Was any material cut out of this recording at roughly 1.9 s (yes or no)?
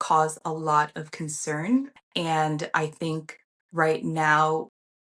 yes